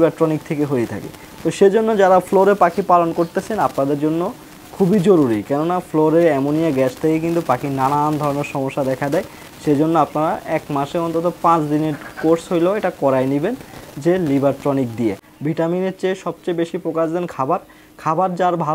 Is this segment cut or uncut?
cut